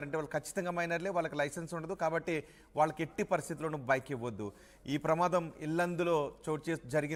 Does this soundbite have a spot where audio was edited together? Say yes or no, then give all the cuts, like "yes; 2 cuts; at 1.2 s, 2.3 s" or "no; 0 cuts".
no; 0 cuts